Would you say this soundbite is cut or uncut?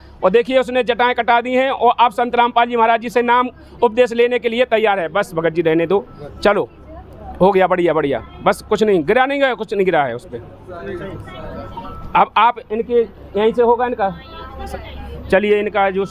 uncut